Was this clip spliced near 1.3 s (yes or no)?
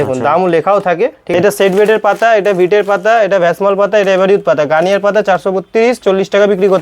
yes